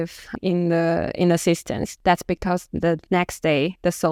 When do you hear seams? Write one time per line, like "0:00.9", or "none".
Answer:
none